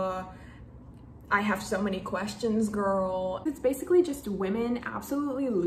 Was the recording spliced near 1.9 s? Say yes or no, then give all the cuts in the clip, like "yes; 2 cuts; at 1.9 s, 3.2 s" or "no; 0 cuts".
no; 1 cut; at 3.5 s